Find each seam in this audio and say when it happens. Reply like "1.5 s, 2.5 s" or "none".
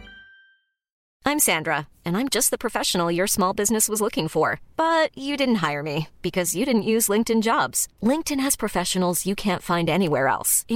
0.9 s